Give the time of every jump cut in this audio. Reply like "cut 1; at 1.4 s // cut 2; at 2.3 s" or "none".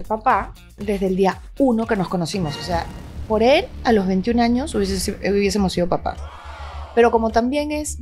none